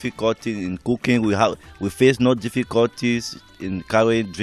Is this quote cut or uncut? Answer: uncut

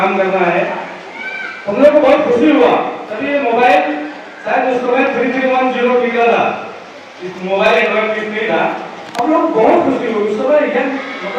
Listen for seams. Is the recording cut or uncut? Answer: uncut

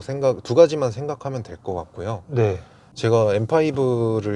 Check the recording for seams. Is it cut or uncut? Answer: cut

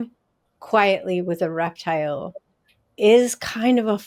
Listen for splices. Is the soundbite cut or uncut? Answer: uncut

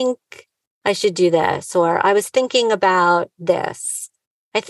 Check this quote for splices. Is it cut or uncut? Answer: uncut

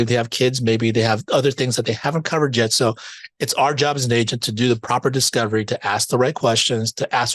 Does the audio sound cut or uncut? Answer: uncut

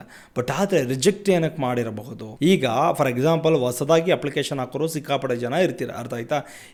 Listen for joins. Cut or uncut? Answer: uncut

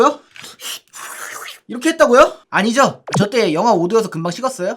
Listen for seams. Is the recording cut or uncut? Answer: uncut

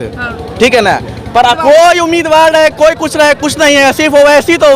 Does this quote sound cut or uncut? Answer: cut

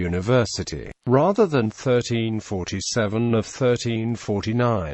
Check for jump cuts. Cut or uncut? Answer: uncut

